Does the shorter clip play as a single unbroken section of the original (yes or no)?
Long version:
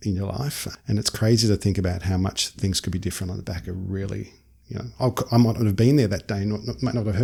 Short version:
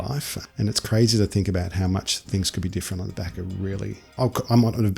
no